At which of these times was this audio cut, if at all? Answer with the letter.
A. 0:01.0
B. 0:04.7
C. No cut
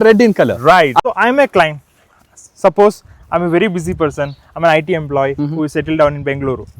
A